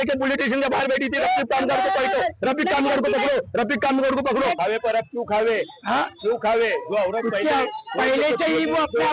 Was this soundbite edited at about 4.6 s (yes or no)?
yes